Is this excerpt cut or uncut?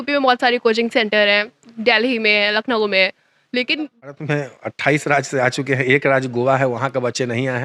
cut